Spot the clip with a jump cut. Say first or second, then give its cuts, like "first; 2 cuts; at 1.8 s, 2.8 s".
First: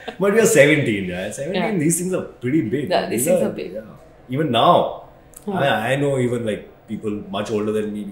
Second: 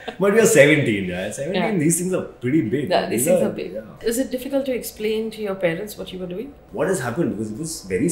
second; 2 cuts; at 3.9 s, 6.6 s